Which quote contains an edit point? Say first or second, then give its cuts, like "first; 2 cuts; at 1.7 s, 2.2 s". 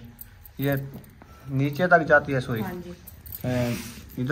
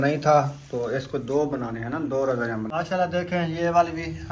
second; 1 cut; at 2.7 s